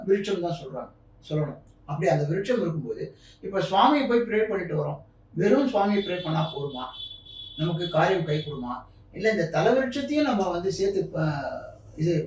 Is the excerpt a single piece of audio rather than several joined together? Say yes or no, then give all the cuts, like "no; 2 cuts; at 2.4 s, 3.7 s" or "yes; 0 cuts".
no; 1 cut; at 1.7 s